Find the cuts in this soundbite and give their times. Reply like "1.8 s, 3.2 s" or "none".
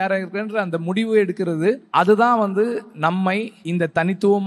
1.8 s, 3.3 s